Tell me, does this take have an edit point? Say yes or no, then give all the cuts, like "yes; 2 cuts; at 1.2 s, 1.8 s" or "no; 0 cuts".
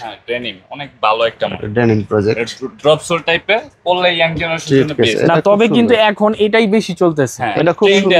no; 0 cuts